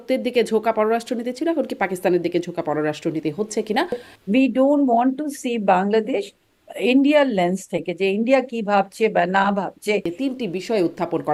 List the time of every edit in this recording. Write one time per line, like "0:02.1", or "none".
0:04.1
0:10.1